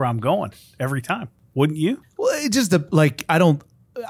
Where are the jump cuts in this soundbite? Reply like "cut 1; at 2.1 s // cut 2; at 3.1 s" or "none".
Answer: cut 1; at 1.4 s // cut 2; at 2.1 s